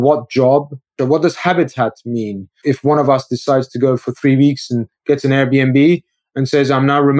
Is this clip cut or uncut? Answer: cut